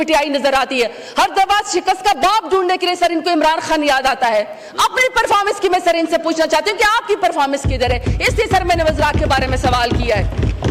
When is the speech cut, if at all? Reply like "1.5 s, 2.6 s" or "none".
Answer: none